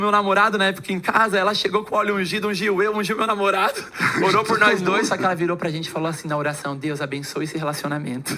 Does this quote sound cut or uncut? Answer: uncut